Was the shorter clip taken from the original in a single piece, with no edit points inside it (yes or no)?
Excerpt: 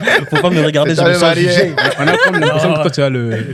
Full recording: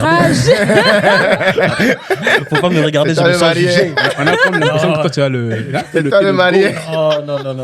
yes